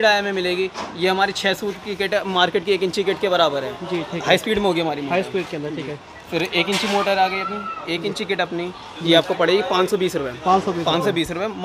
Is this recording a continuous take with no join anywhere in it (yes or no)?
yes